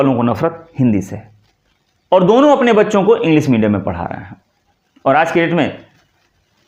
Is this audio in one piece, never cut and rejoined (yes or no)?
yes